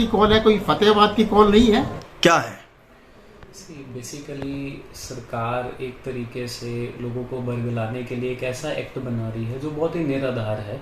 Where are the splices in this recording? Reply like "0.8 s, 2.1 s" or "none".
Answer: 2.0 s